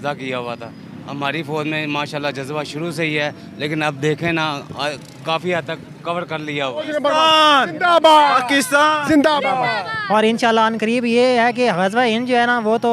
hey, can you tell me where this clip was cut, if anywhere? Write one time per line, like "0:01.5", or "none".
0:06.9